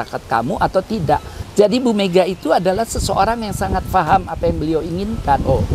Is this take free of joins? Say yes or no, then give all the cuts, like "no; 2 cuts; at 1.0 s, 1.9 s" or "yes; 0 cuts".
no; 1 cut; at 1.4 s